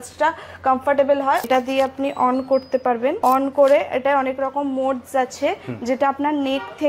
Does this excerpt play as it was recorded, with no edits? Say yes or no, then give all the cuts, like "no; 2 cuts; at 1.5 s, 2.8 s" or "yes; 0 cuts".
no; 2 cuts; at 1.5 s, 3.2 s